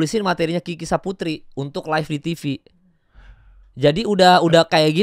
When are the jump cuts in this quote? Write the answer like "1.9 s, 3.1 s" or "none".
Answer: none